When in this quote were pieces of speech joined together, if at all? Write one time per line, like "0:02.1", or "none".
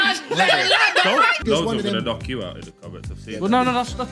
0:01.4